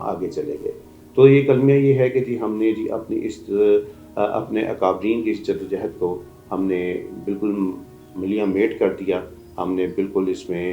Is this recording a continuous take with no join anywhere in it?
yes; 0 cuts

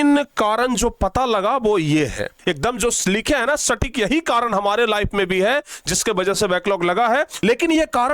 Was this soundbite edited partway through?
yes; 2 cuts; at 2.3 s, 7.3 s

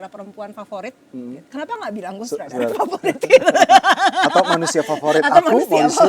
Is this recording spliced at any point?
no; 0 cuts

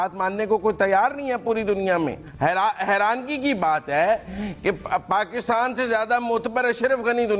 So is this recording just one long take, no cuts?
no; 1 cut; at 2.2 s

